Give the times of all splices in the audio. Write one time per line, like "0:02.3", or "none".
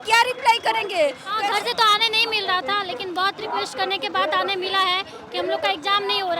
0:01.3